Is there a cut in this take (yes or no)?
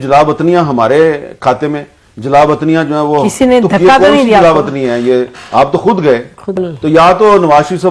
yes